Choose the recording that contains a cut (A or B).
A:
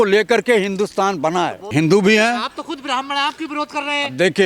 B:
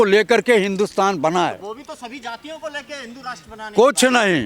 A